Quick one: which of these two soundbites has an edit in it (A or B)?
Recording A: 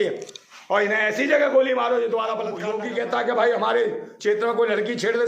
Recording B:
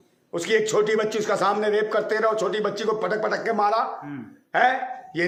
A